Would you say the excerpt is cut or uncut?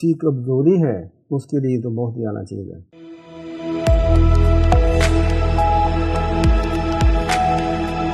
uncut